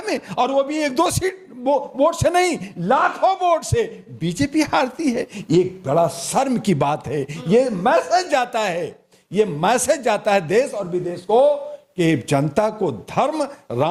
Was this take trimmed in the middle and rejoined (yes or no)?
no